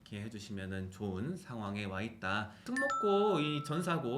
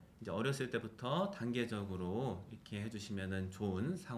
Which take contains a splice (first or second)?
first